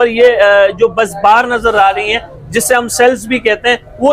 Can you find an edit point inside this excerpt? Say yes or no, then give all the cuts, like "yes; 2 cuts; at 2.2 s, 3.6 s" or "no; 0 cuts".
no; 0 cuts